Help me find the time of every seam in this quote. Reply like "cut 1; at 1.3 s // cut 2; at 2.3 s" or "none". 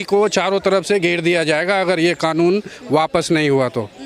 none